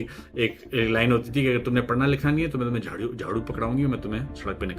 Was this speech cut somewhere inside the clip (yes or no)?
no